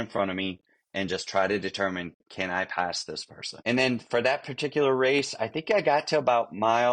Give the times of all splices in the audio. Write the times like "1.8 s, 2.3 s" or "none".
3.5 s